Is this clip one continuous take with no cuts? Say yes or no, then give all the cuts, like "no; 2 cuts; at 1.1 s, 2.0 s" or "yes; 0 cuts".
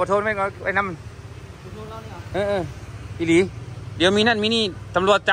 yes; 0 cuts